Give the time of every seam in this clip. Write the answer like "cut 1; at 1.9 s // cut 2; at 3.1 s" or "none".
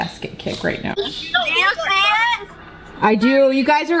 cut 1; at 0.9 s